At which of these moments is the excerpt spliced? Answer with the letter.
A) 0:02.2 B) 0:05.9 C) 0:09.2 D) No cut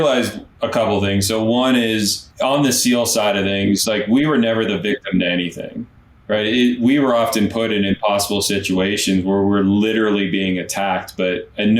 A